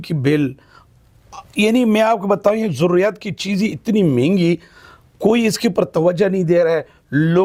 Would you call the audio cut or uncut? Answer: uncut